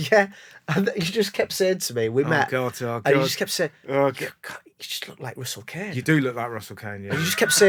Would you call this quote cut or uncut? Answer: uncut